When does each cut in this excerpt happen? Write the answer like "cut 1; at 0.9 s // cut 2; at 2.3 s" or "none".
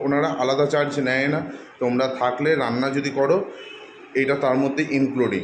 none